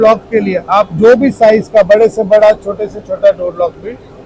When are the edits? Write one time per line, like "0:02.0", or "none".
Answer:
none